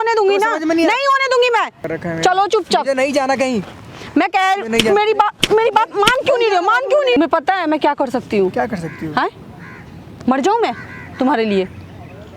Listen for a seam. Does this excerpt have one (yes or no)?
yes